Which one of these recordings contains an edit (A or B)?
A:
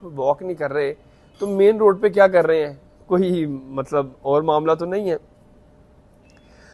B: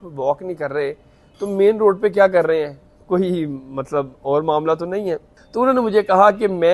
B